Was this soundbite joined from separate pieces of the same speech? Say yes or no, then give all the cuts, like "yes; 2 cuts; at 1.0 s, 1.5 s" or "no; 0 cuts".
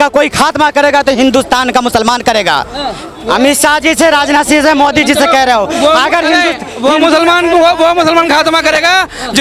no; 0 cuts